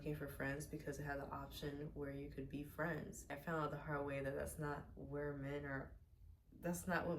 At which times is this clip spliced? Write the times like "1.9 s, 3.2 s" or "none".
3.4 s